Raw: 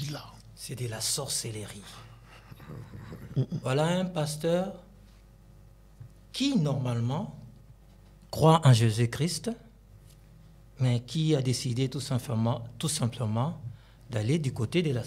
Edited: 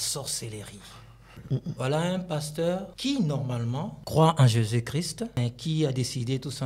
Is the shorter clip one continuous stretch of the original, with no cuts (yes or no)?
no